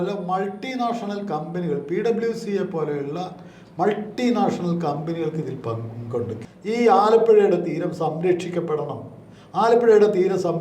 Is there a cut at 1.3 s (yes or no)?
no